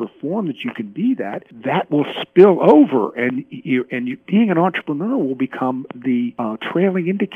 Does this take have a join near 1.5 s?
yes; 2 cuts; at 1.5 s, 6.3 s

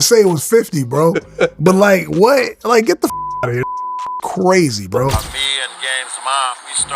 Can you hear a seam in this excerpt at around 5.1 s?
yes; 1 cut; at 5.1 s

